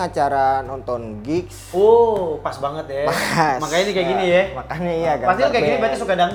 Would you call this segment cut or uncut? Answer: uncut